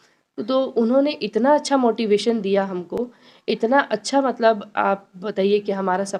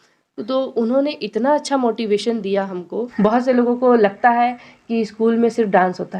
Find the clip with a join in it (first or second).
second